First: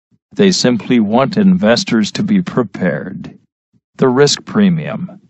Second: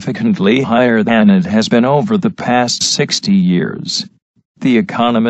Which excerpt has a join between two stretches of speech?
first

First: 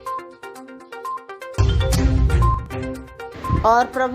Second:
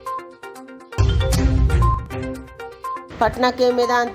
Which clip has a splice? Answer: second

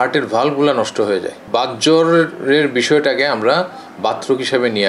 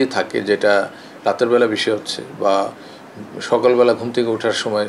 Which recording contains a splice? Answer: first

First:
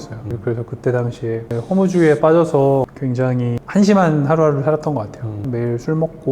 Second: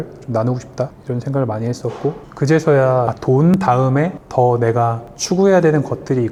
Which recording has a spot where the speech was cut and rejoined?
first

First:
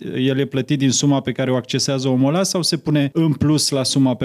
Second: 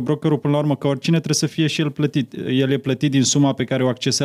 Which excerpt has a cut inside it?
first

